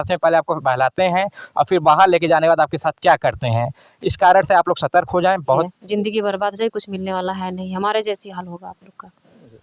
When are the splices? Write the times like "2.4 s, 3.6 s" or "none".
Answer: 5.8 s